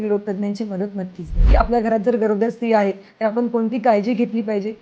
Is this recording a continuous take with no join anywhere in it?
no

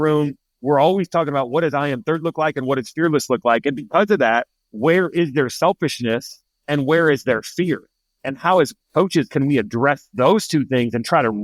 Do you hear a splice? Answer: no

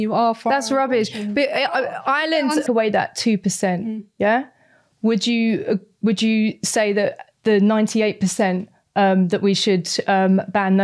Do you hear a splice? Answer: yes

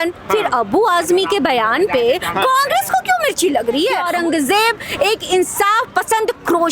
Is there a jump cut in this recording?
yes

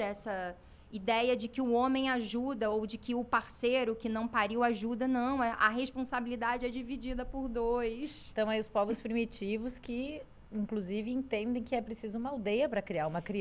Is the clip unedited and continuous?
yes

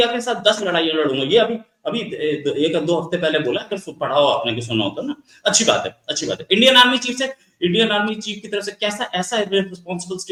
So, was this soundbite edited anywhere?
no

